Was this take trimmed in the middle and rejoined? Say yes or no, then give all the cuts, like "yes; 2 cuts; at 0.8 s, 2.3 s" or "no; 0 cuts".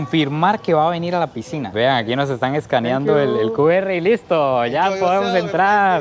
no; 0 cuts